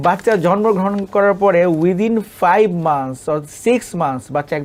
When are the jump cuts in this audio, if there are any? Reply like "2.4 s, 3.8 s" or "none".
none